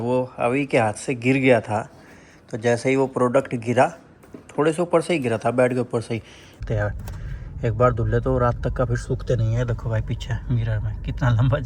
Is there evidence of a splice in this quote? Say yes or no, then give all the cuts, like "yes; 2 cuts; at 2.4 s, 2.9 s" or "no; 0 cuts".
yes; 1 cut; at 6.6 s